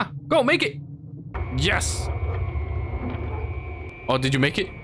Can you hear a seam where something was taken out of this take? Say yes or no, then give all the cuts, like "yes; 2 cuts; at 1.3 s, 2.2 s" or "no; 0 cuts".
yes; 2 cuts; at 1.4 s, 3.9 s